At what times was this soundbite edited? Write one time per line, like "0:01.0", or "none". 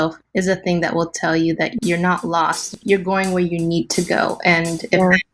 0:02.6